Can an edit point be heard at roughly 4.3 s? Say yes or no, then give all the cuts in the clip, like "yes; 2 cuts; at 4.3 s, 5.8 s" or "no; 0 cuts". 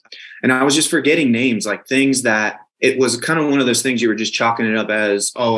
no; 1 cut; at 2.6 s